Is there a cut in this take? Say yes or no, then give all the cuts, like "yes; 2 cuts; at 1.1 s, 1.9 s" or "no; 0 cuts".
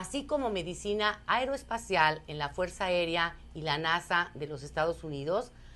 yes; 1 cut; at 1.8 s